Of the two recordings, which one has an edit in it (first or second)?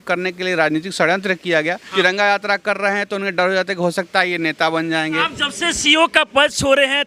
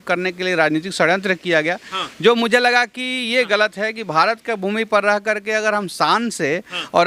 first